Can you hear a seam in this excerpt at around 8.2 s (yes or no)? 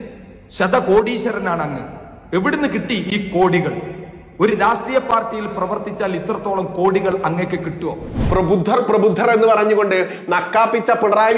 yes